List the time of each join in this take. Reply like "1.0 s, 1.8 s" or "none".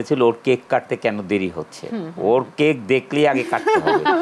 none